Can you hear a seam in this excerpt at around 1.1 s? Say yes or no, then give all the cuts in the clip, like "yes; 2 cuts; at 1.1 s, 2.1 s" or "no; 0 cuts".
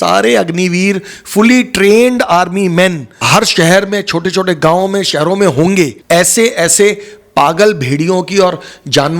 no; 2 cuts; at 3.1 s, 6.0 s